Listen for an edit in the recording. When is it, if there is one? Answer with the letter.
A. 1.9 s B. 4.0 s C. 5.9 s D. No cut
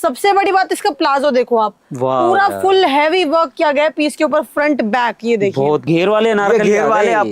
C